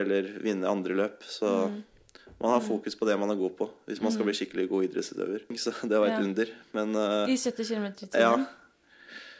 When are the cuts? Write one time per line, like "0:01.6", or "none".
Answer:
0:05.6